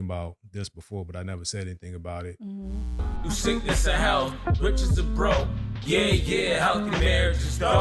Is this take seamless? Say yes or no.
no